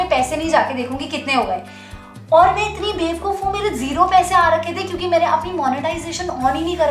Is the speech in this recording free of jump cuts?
yes; 0 cuts

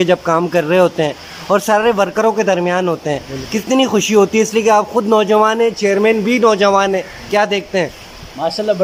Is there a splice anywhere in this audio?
no; 0 cuts

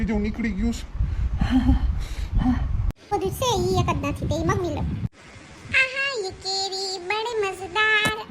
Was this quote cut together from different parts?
yes; 1 cut; at 3.1 s

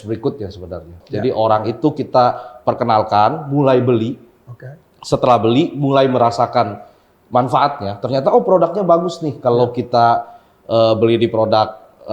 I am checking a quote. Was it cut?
yes; 1 cut; at 1.0 s

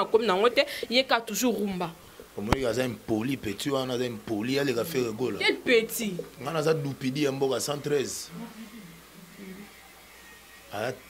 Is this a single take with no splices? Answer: yes; 0 cuts

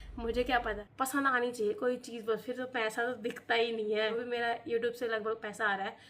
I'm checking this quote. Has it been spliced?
yes; 2 cuts; at 0.9 s, 4.2 s

